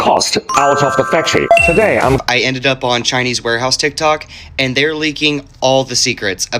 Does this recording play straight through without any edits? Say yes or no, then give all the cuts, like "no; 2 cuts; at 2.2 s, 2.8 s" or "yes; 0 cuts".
no; 1 cut; at 2.2 s